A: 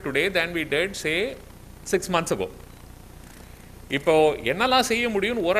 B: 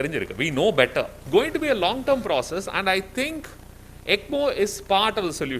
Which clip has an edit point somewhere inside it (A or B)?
B